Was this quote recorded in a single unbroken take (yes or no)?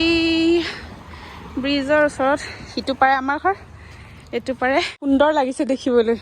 no